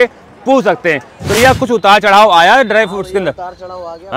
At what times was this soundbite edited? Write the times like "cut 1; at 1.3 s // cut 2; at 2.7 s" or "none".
cut 1; at 1.4 s